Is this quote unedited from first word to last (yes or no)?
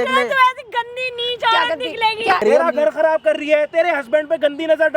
no